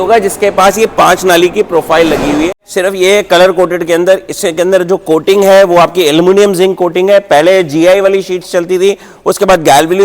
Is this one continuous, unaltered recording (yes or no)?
no